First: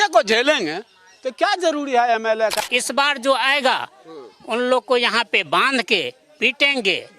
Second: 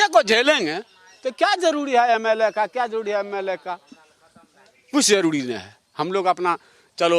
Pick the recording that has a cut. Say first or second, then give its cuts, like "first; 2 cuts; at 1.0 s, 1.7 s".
first; 1 cut; at 2.6 s